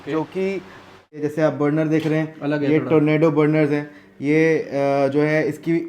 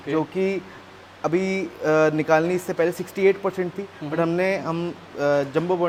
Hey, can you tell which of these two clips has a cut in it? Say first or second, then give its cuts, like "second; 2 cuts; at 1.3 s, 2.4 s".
first; 1 cut; at 1.2 s